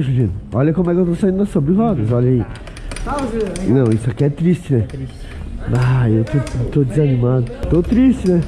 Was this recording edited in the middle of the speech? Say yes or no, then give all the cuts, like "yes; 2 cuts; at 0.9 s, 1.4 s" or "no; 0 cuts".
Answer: yes; 1 cut; at 7.6 s